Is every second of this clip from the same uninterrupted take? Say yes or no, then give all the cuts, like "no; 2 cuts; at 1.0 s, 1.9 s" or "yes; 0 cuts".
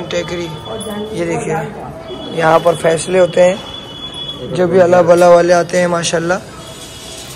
yes; 0 cuts